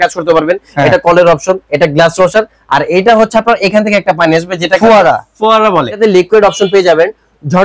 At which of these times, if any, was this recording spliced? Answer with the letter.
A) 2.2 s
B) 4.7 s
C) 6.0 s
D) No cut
C